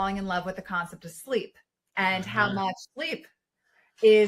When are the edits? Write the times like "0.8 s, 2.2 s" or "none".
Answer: none